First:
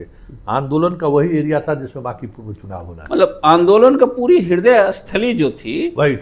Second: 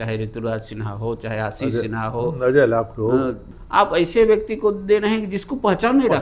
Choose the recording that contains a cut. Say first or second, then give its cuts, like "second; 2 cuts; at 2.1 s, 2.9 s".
second; 1 cut; at 3.5 s